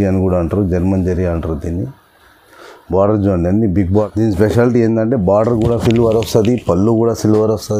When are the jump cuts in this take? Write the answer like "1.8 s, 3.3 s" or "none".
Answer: 4.1 s